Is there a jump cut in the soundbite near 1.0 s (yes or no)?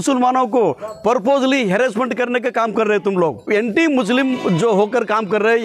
no